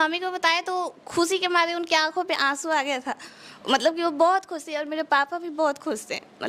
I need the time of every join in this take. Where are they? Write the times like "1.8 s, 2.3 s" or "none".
none